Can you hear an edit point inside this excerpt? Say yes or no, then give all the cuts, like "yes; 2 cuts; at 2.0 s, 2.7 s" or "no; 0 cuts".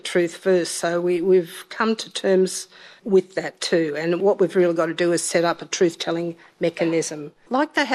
yes; 2 cuts; at 3.0 s, 4.2 s